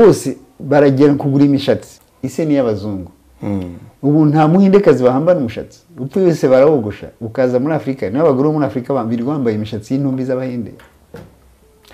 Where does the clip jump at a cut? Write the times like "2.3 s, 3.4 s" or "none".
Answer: 2.0 s